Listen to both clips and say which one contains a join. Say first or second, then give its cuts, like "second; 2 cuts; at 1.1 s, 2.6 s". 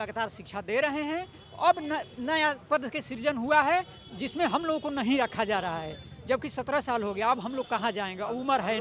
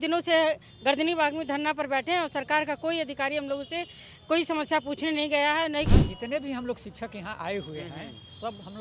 second; 1 cut; at 5.9 s